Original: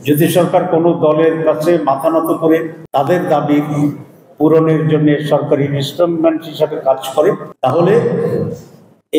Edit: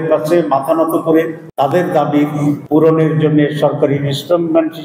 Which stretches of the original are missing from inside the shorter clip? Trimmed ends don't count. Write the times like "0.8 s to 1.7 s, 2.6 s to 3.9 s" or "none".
4.0 s to 4.3 s